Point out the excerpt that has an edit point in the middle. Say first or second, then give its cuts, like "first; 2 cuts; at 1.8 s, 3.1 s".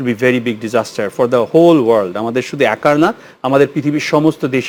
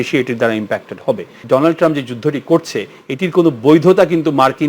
second; 1 cut; at 1.4 s